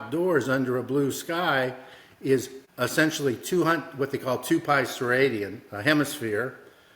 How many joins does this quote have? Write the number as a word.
one